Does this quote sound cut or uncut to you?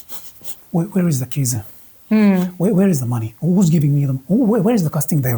uncut